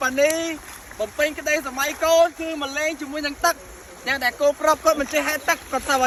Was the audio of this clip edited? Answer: no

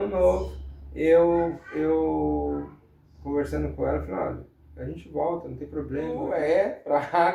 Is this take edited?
yes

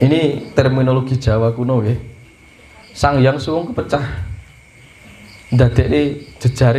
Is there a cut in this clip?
no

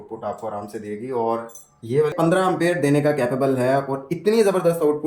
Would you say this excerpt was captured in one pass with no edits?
no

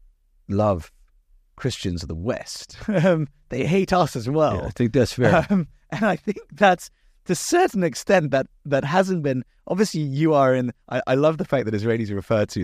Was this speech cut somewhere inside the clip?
no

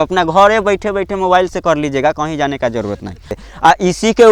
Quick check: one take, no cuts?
no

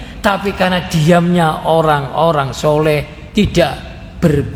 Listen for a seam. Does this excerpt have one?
no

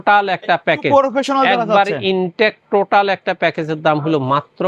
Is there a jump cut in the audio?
no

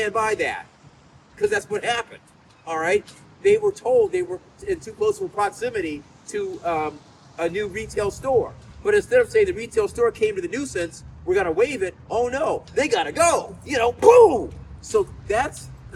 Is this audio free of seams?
yes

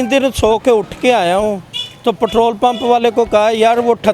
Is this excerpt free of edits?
yes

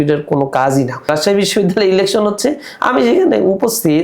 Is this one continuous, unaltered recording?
no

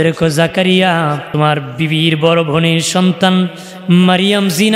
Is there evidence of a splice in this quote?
yes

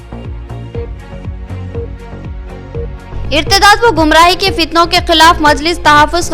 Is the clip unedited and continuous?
yes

